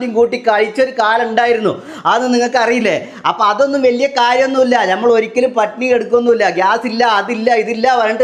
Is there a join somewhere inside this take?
no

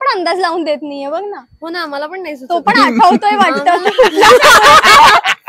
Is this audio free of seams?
yes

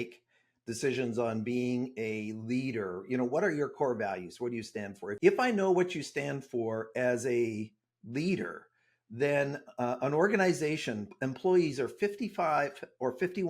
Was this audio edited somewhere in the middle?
yes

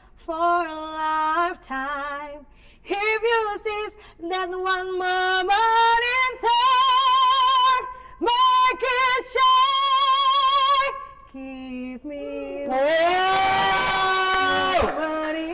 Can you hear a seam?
no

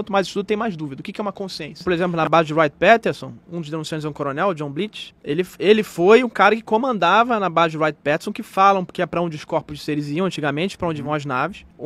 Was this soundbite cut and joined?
yes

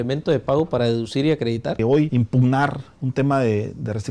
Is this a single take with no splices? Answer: no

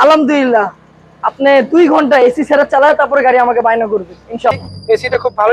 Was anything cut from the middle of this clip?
yes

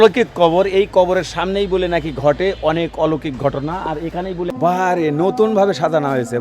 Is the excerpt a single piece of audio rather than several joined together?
no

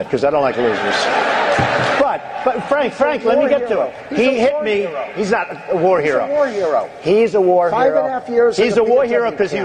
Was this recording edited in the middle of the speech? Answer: yes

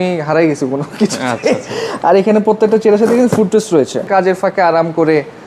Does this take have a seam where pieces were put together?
yes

